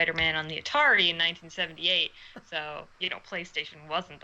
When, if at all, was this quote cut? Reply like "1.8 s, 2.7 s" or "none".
2.9 s